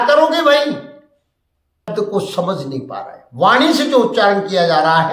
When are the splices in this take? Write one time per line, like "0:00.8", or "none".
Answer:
0:01.9